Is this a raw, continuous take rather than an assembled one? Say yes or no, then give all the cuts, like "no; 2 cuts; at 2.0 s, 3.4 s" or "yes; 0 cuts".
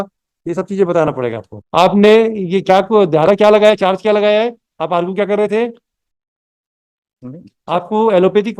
no; 1 cut; at 1.5 s